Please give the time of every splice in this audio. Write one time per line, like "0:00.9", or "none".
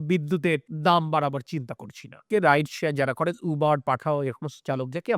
0:02.2